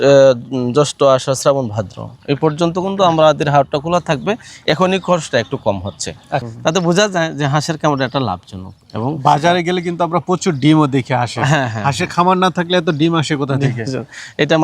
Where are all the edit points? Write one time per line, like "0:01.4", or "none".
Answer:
0:06.4